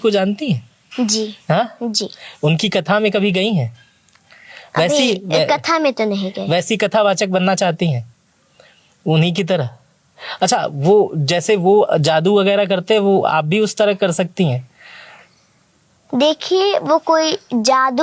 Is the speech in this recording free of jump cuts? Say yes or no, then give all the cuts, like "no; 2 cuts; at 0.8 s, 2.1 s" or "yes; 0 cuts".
yes; 0 cuts